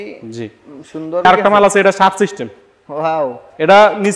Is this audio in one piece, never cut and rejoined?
no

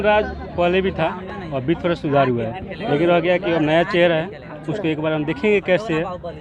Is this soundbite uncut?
yes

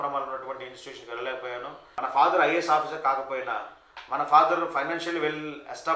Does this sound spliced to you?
yes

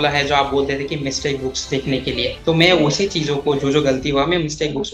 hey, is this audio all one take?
yes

